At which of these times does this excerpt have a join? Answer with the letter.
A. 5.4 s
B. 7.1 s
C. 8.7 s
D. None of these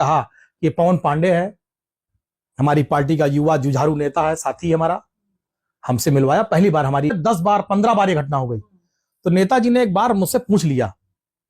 B